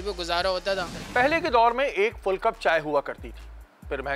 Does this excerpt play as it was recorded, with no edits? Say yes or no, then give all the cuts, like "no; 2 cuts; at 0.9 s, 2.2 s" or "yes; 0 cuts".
yes; 0 cuts